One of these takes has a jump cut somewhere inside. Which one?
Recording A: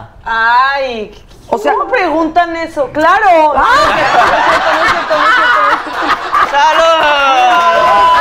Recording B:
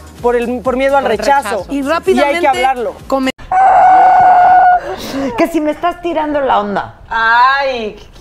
B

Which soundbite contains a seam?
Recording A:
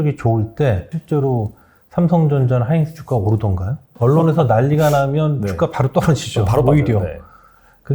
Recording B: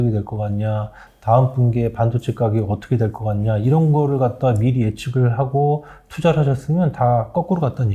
A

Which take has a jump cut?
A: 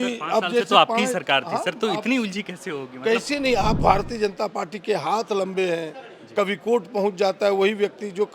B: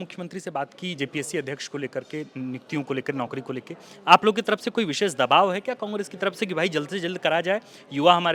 A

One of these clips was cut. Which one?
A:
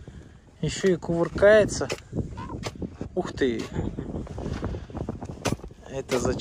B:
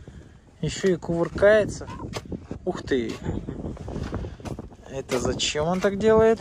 B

